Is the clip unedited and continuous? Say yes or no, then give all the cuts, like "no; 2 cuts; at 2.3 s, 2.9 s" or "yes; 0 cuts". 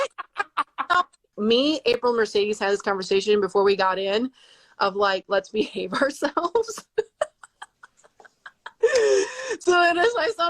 no; 1 cut; at 1.2 s